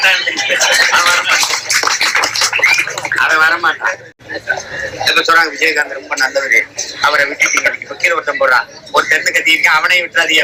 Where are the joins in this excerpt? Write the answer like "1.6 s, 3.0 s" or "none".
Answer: none